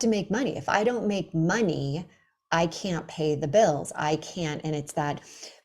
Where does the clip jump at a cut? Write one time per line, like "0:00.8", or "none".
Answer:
none